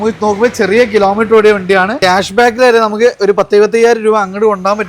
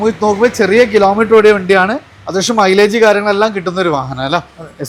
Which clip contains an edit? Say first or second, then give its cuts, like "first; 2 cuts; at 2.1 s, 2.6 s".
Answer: first; 1 cut; at 2.0 s